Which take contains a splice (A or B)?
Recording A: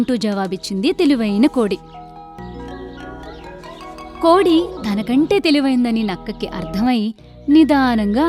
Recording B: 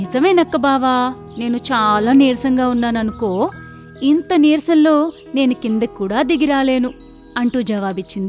A